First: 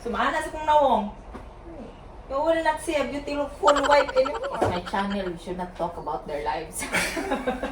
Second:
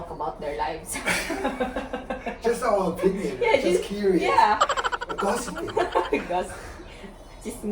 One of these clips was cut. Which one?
first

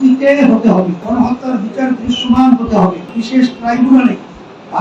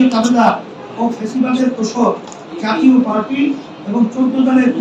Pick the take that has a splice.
first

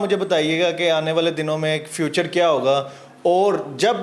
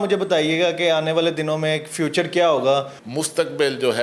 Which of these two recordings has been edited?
second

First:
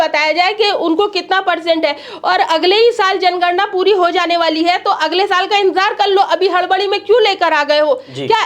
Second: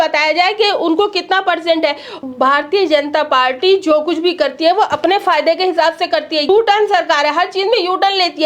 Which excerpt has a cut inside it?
second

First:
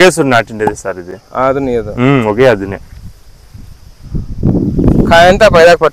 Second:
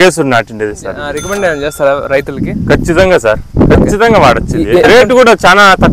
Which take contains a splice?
second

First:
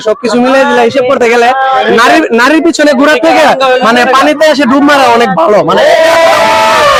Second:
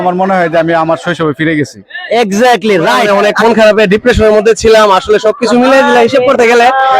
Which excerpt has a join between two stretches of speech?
second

